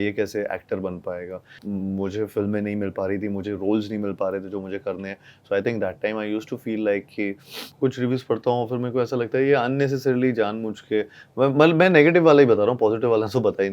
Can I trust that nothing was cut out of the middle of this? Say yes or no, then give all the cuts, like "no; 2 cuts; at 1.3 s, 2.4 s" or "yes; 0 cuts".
no; 2 cuts; at 1.6 s, 7.6 s